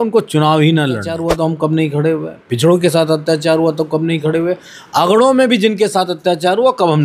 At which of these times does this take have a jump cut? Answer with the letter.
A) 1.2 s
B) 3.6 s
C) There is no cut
A